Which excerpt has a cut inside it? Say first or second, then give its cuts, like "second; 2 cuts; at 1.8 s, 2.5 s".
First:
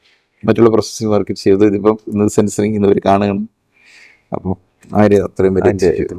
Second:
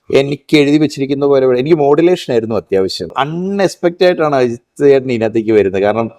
second; 1 cut; at 3.1 s